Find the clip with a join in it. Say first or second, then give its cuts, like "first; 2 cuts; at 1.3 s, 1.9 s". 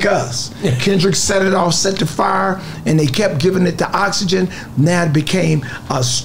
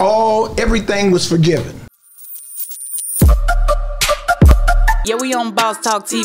second; 1 cut; at 2.1 s